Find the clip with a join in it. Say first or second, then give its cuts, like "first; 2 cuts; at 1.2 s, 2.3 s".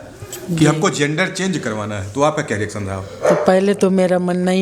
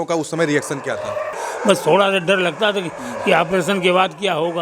second; 1 cut; at 1.4 s